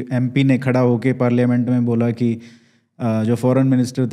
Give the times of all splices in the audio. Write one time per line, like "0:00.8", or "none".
none

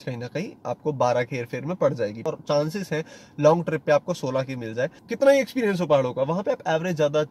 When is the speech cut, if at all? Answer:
0:02.2
0:05.0

